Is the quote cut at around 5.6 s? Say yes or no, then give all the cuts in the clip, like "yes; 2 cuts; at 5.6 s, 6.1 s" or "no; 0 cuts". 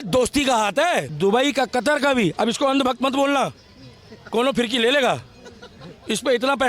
no; 1 cut; at 1.1 s